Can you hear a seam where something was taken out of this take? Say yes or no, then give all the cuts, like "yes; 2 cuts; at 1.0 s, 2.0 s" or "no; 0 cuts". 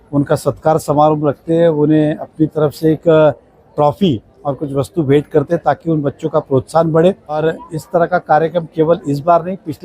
yes; 1 cut; at 7.4 s